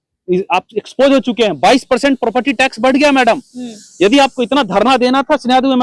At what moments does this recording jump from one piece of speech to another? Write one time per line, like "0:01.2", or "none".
none

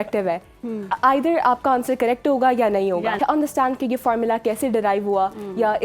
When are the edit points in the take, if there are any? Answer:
0:03.2

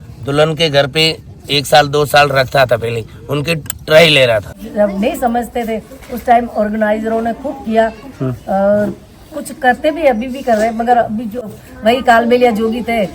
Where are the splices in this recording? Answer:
0:04.6
0:11.5

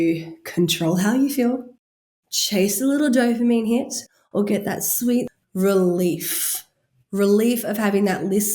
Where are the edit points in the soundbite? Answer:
0:05.3

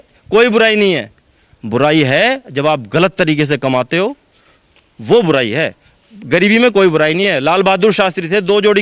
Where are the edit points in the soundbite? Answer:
none

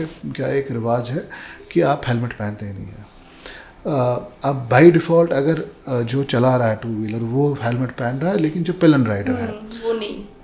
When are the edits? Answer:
none

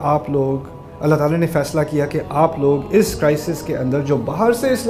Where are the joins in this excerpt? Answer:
none

